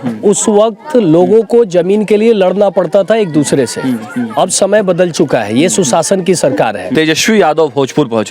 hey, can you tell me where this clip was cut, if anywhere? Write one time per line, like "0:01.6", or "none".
0:06.8